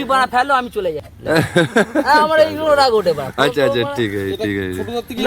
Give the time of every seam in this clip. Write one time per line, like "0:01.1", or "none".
0:01.1